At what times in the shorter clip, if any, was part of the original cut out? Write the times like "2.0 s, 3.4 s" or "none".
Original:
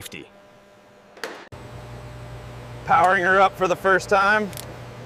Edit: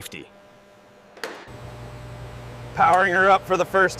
1.5 s